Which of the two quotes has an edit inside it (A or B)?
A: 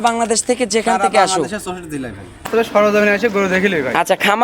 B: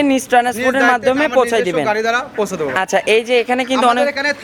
A